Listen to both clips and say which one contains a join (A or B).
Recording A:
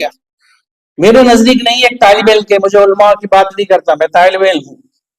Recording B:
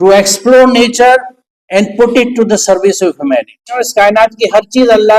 B